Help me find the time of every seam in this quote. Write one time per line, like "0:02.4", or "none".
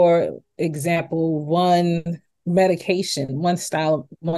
0:02.3

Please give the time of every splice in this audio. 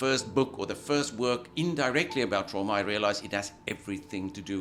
none

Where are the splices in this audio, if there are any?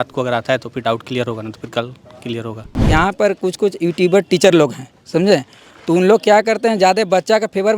0:02.8

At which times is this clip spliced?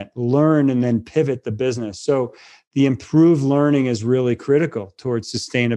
none

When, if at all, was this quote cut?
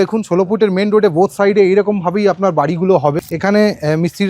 0:03.2

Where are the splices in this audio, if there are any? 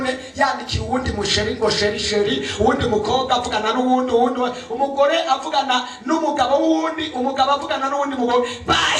none

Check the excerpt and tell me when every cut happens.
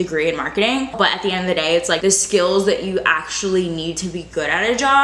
0:00.9
0:02.0

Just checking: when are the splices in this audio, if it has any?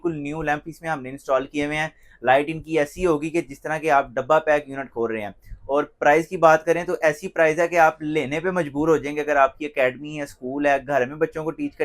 none

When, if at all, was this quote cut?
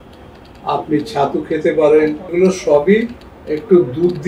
0:02.3

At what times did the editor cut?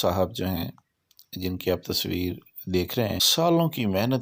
0:03.3

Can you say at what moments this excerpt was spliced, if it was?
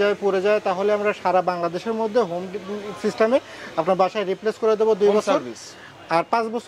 none

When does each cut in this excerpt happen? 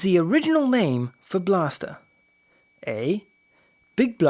0:00.9

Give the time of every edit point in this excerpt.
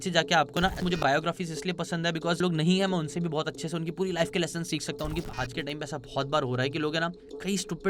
0:01.0
0:02.4
0:05.1

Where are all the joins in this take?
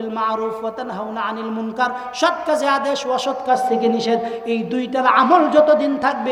none

